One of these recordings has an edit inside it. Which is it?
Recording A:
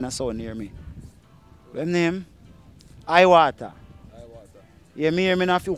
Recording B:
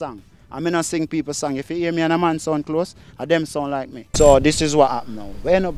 B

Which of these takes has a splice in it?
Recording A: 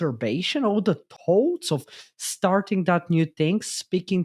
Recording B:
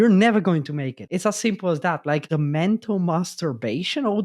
B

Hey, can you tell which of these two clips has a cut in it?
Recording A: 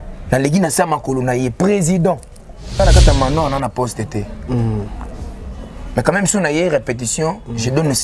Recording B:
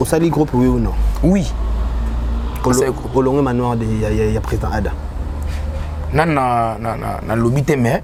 A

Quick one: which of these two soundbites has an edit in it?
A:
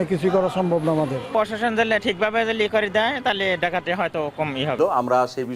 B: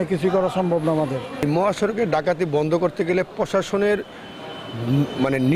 A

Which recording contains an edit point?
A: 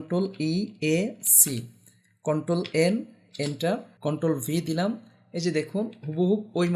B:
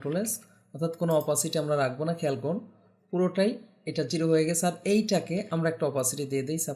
A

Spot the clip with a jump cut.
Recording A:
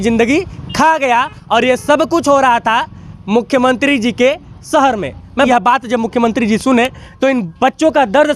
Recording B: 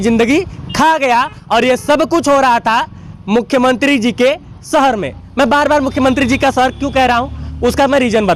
A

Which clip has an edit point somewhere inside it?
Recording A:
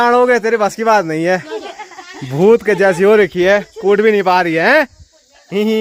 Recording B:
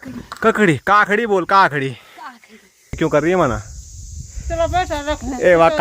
B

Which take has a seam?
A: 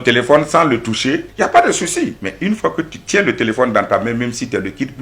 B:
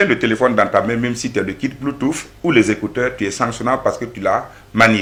A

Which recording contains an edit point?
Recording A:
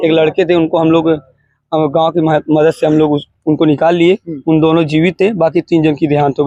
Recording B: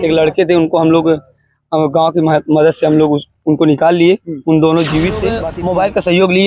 B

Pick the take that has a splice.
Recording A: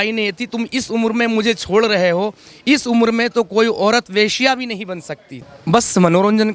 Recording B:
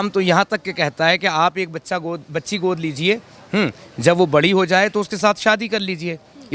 A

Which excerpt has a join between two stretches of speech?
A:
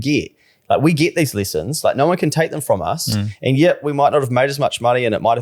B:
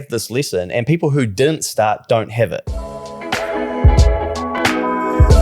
B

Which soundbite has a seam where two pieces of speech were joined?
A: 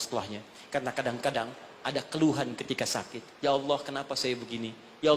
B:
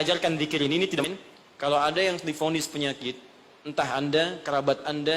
B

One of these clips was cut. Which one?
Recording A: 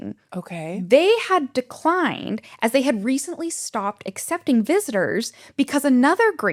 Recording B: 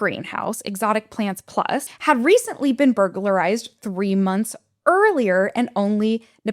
B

